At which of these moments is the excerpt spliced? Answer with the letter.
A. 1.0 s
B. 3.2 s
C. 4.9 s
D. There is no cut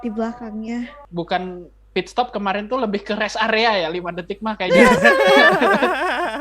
A